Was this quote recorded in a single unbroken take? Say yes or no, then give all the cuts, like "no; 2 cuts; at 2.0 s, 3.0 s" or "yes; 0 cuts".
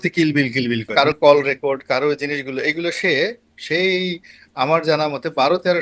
no; 1 cut; at 0.9 s